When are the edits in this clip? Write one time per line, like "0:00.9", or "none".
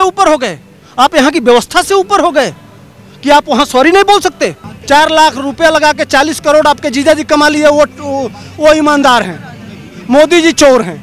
0:04.7